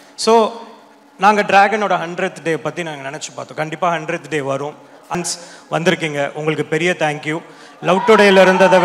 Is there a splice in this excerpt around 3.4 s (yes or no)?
no